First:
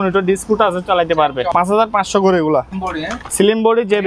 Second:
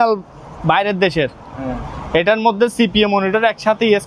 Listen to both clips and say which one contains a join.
first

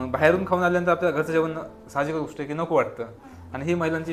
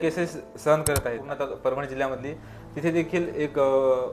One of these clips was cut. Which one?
second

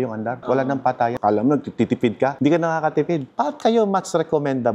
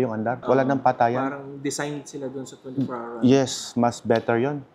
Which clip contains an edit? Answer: first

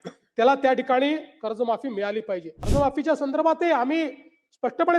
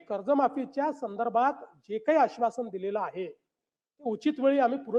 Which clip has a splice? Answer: first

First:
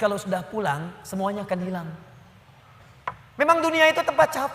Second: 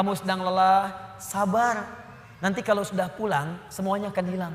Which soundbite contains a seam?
first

